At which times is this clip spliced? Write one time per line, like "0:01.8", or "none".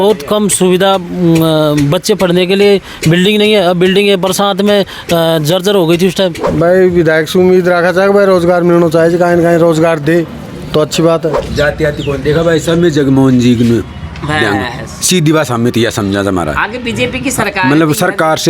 0:06.4
0:11.4